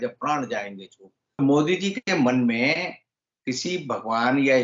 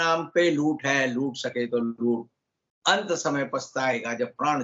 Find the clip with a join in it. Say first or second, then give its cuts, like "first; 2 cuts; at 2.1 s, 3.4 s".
first; 1 cut; at 1.4 s